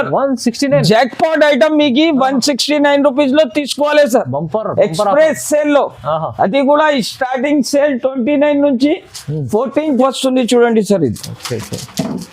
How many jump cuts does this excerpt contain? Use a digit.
1